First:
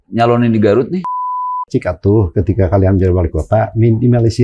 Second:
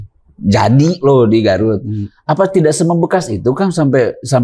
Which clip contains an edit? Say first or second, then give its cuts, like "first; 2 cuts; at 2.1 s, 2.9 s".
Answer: first; 1 cut; at 1.1 s